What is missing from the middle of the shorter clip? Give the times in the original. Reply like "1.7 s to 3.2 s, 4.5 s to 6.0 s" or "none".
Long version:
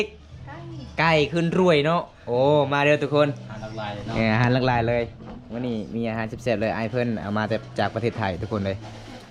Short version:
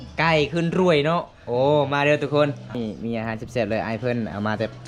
3.5 s to 5.6 s